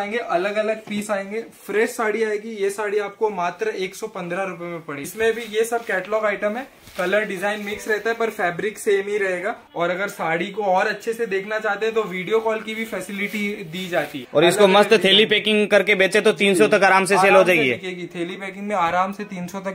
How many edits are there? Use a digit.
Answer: 3